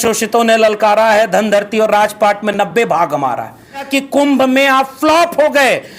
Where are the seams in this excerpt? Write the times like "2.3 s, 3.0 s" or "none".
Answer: 3.9 s